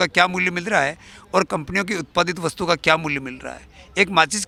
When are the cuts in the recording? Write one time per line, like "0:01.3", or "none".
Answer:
none